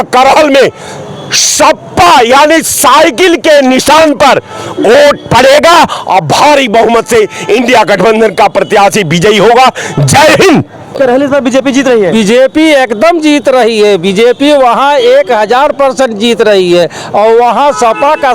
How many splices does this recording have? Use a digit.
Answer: 1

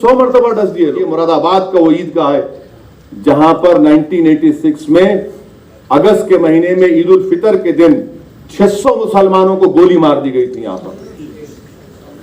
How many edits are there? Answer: 1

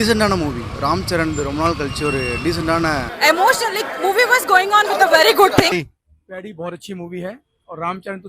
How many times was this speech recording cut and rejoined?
2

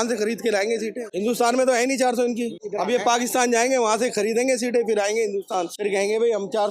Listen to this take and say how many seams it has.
3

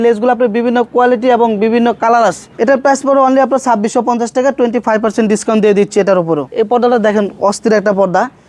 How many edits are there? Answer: 2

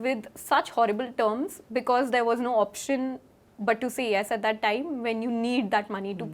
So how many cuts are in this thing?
0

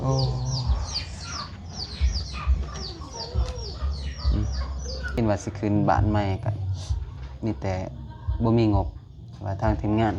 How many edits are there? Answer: 1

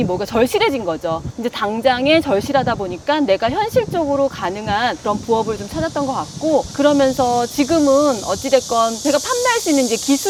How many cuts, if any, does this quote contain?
0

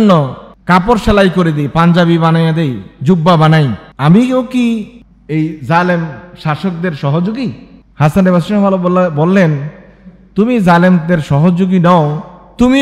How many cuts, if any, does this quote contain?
0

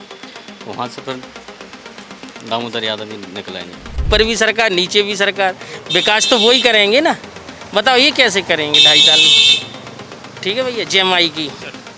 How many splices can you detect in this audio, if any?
1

